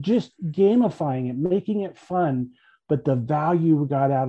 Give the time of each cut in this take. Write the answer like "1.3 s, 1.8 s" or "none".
none

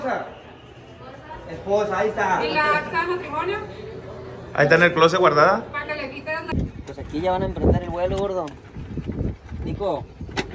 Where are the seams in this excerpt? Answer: 6.5 s

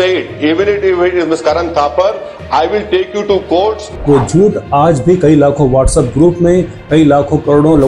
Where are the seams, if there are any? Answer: 3.9 s

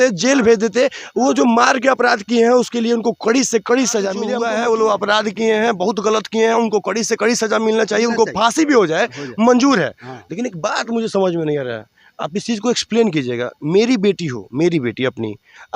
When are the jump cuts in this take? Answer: 4.3 s

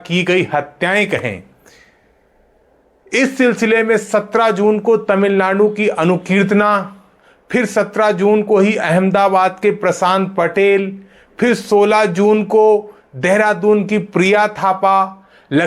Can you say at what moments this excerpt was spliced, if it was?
none

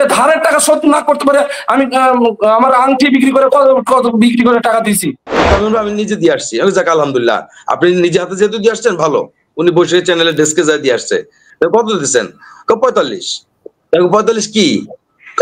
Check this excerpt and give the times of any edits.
5.3 s

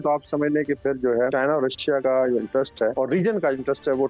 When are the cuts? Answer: 1.8 s, 2.9 s

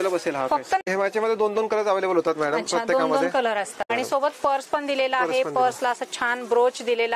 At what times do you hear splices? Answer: 0.8 s, 3.9 s

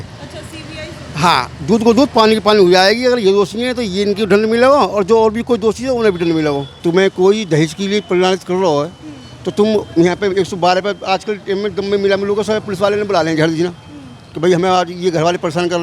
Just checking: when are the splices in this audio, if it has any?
none

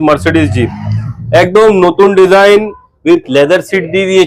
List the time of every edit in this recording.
none

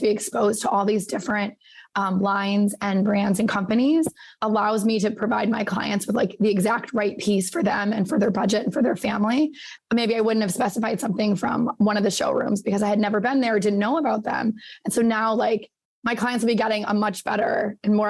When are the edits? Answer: 4.2 s, 9.6 s

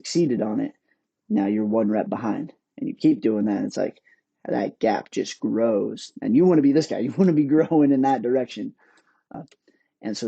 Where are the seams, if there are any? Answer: 9.3 s

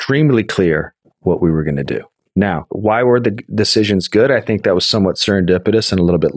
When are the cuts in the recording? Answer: 2.6 s

